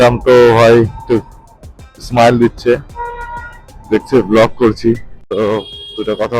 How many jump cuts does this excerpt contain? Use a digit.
1